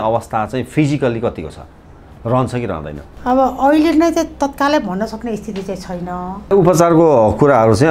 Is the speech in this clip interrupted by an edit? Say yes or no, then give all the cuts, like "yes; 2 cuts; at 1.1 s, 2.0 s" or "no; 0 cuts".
yes; 1 cut; at 6.5 s